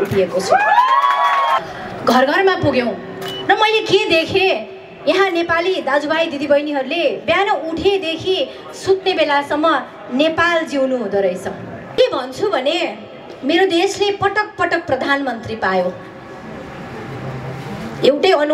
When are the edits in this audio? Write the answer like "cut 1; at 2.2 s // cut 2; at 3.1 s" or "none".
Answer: cut 1; at 1.6 s // cut 2; at 12.0 s